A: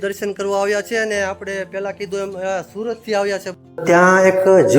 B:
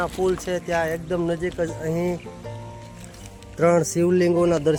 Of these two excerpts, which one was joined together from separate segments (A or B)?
A